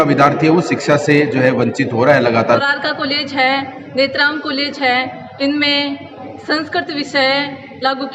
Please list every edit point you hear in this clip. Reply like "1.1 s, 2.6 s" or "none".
2.6 s